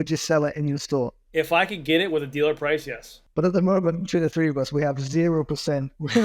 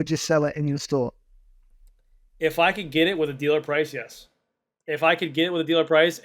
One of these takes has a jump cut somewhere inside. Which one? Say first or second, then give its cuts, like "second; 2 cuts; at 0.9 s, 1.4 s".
first; 2 cuts; at 1.2 s, 3.2 s